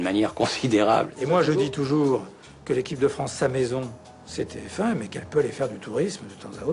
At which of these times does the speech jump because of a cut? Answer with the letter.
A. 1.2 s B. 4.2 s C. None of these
A